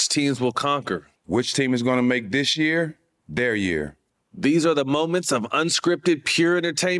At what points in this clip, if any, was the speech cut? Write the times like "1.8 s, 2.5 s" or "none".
none